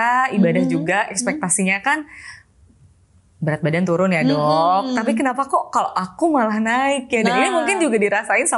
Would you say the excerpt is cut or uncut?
uncut